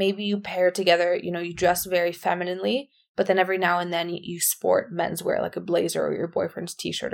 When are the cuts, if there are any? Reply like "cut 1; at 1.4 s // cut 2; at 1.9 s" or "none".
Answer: none